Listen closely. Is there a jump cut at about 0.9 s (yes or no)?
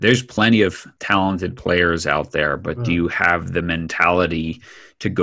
yes